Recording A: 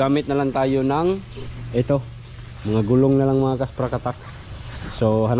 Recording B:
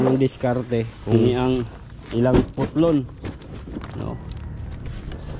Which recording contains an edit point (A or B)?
B